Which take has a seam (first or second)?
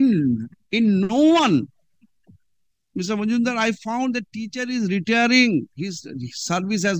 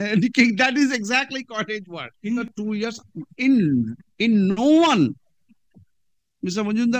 second